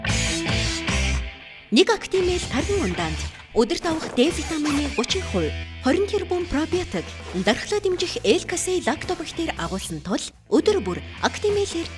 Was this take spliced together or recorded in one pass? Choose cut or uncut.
uncut